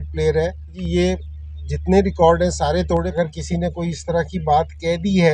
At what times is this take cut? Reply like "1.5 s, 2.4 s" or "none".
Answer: 0.8 s, 3.1 s

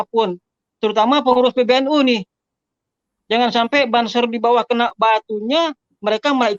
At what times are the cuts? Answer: none

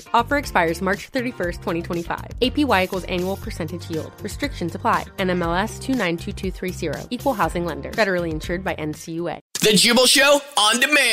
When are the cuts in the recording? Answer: 9.5 s

